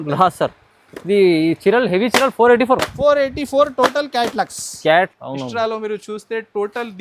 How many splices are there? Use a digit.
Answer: 1